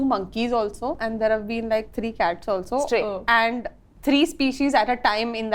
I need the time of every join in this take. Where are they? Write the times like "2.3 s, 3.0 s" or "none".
1.0 s

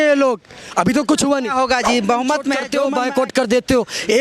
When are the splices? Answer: 2.7 s

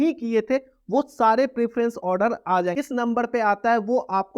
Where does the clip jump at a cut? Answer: 2.7 s

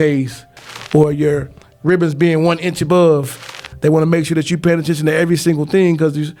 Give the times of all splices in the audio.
none

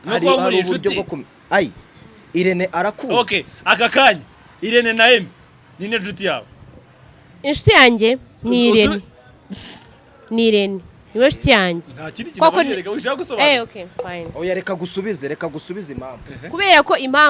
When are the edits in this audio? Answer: none

